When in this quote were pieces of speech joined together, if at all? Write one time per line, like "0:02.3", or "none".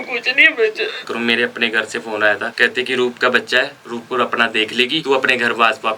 0:01.1
0:02.5
0:05.0